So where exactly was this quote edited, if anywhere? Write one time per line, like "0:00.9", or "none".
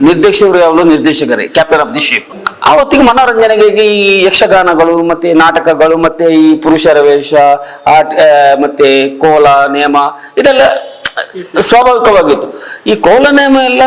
0:02.4